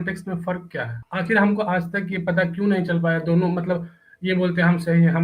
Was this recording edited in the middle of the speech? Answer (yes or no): yes